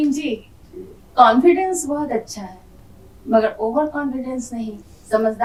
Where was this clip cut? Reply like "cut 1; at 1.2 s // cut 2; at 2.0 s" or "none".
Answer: none